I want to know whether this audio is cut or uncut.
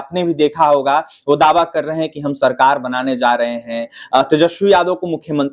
uncut